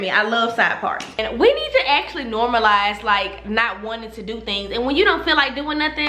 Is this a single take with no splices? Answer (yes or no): no